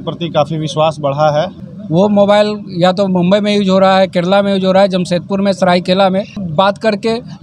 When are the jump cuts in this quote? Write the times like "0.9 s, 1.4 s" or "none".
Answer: 1.6 s, 6.4 s

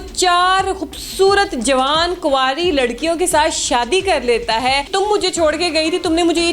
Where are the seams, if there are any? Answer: 4.9 s

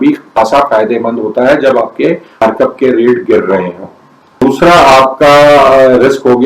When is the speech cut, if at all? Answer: 4.4 s

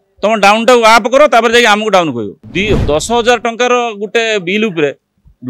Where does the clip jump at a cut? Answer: 2.4 s

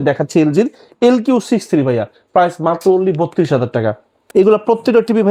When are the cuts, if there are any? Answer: none

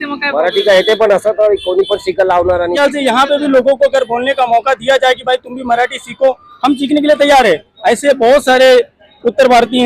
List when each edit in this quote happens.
2.7 s

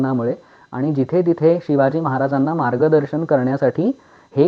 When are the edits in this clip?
none

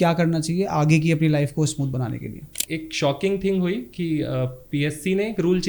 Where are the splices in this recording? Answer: 2.6 s

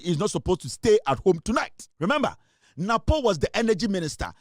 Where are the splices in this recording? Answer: 1.8 s

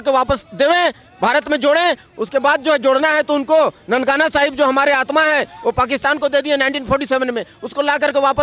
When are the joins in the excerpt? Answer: none

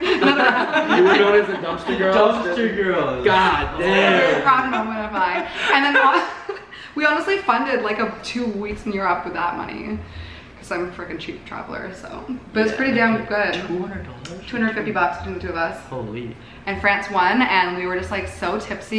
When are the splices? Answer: none

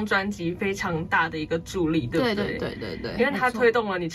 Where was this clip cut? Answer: none

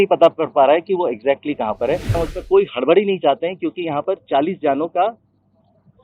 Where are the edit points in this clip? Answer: 2.2 s

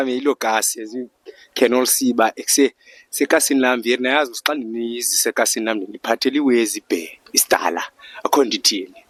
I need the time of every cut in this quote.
none

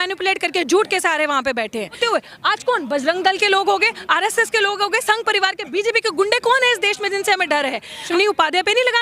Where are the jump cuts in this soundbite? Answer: 2.0 s, 8.1 s

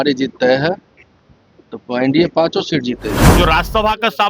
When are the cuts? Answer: 3.2 s

